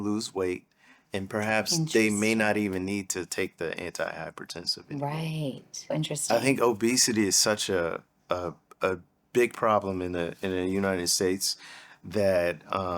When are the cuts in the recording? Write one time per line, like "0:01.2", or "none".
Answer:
0:05.9
0:09.1